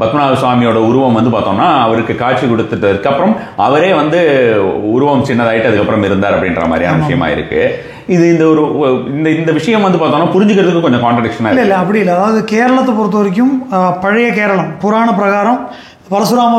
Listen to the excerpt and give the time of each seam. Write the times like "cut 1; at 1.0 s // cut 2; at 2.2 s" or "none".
none